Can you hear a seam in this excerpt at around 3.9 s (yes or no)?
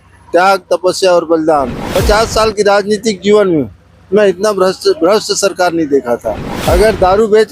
no